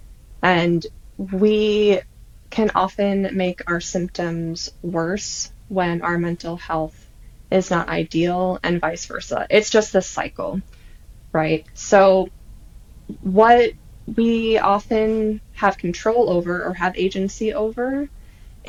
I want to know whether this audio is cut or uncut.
uncut